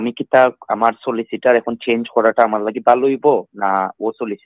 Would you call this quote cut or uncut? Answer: uncut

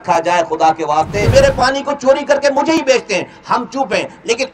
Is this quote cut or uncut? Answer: cut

